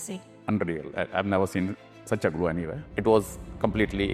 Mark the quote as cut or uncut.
cut